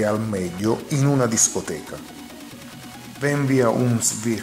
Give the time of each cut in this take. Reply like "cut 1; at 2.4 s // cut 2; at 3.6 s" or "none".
cut 1; at 2.0 s // cut 2; at 3.2 s